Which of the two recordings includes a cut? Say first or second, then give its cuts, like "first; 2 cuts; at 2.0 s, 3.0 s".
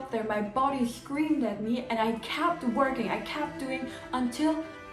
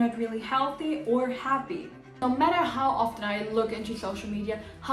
second; 1 cut; at 2.0 s